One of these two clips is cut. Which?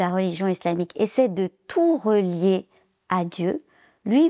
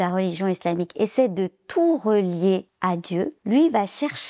second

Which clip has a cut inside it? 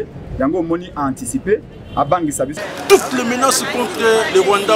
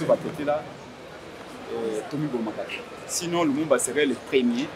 first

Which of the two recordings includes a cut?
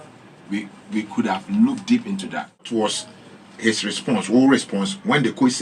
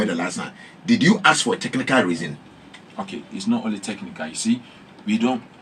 first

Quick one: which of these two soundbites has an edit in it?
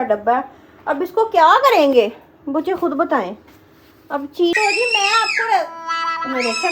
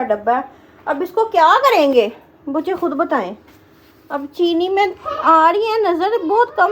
first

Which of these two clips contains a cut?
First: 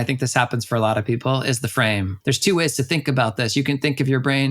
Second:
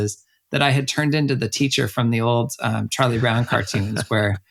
first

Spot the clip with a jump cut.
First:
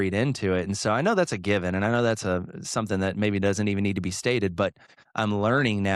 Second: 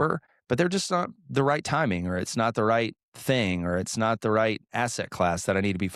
first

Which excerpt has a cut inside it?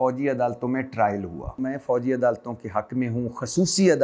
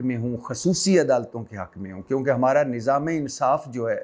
first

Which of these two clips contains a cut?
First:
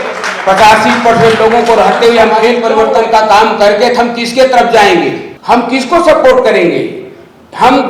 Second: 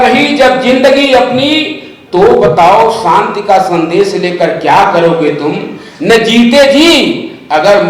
first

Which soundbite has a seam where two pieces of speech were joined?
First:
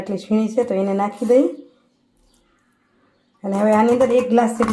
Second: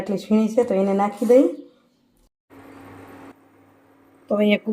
second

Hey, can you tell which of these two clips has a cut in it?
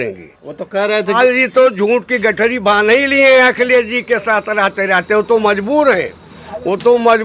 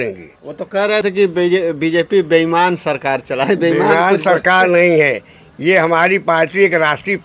first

